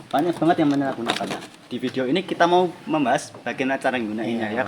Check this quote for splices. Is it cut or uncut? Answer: uncut